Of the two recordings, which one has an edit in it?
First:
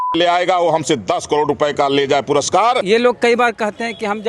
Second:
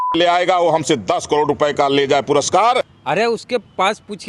first; 1 cut; at 2.8 s

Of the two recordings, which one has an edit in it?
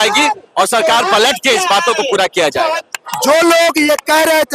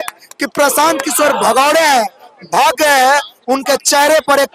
first; 1 cut; at 2.8 s

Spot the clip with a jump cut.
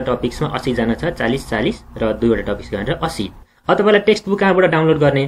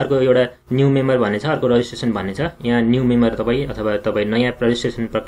first; 1 cut; at 3.5 s

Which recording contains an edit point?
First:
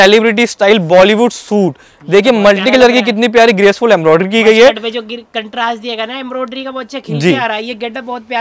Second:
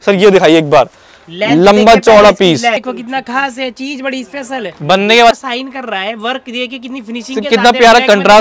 second; 2 cuts; at 2.8 s, 5.3 s

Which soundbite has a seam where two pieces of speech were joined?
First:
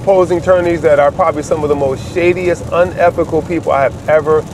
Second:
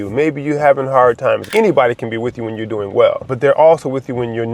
second; 2 cuts; at 1.5 s, 3.3 s

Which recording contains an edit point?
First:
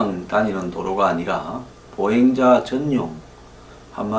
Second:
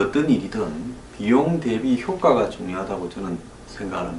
first; 1 cut; at 2.9 s

